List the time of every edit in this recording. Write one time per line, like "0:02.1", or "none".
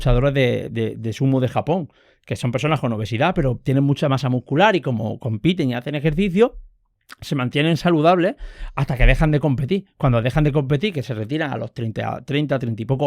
none